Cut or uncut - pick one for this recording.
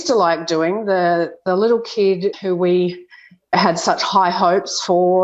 cut